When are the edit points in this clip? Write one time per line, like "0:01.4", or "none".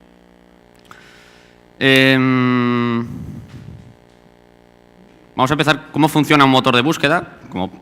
0:03.1